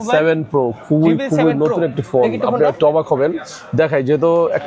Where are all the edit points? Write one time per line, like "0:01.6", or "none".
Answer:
none